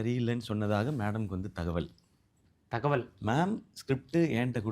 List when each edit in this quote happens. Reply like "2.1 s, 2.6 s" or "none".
none